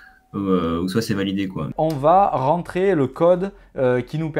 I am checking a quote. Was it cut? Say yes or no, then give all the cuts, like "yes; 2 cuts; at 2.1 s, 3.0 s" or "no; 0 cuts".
yes; 1 cut; at 1.7 s